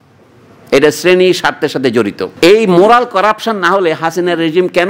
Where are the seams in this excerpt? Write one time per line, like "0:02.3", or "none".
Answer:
0:02.2